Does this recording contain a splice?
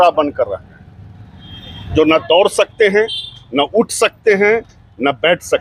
no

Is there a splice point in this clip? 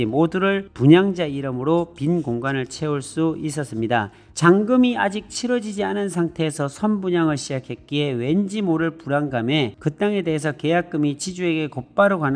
yes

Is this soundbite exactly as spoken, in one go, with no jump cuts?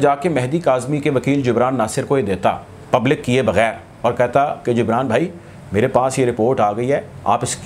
yes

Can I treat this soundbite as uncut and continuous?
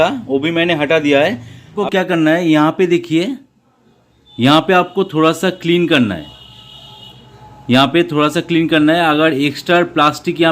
no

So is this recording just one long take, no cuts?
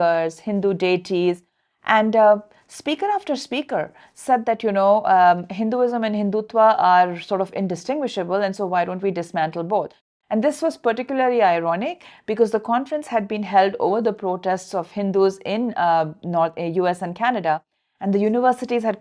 yes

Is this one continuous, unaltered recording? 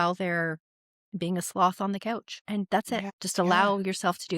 no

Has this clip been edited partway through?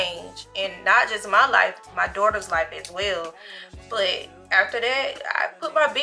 no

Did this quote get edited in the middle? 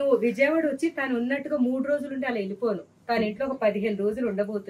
no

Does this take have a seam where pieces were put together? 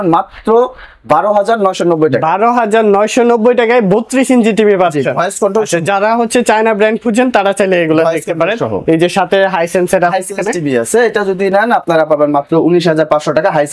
no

